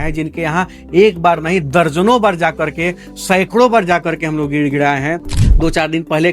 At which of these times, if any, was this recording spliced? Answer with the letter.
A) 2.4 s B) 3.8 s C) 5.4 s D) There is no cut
C